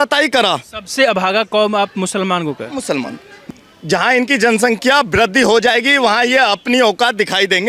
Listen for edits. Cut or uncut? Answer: cut